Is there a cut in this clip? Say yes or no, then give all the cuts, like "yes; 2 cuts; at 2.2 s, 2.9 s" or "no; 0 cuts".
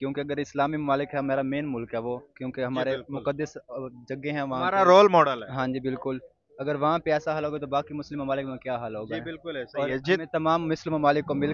no; 0 cuts